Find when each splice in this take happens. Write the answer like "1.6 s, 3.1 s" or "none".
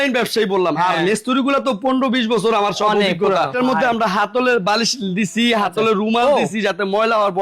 3.5 s